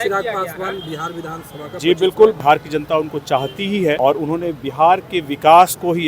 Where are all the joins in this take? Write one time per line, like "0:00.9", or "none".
0:02.3
0:04.0